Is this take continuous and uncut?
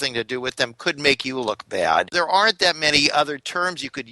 no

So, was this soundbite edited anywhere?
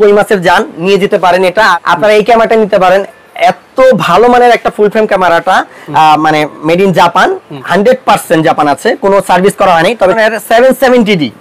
yes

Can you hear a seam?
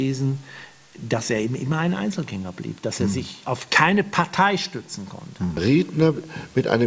yes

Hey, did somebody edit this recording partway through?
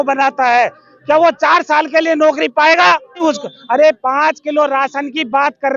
yes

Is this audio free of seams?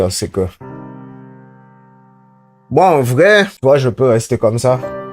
no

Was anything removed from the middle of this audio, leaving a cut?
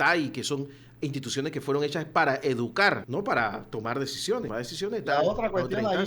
yes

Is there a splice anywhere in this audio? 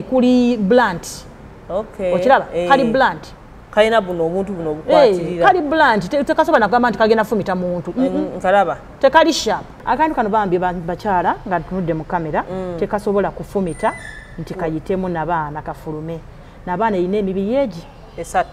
yes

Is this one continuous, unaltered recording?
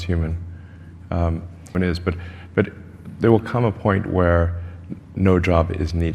no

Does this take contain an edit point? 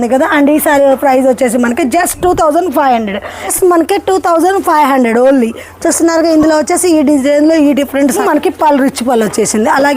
yes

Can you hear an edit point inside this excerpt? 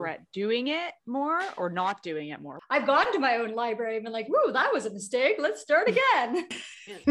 yes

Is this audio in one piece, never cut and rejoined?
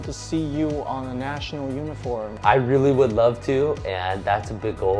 no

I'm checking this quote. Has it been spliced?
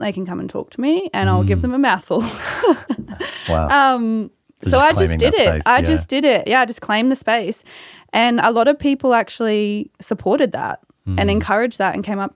no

